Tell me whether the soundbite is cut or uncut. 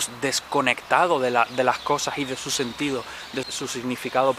cut